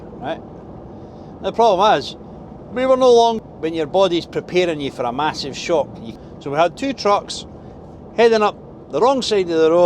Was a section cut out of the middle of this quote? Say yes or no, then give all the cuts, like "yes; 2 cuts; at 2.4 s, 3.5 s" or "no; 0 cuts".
yes; 2 cuts; at 3.3 s, 6.0 s